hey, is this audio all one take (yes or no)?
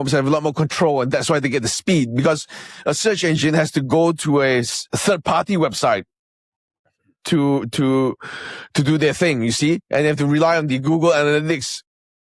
yes